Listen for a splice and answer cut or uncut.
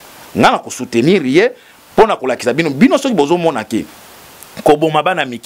uncut